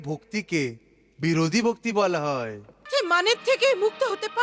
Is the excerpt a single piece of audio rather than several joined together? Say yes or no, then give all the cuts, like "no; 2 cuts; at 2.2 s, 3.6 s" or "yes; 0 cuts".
no; 1 cut; at 2.9 s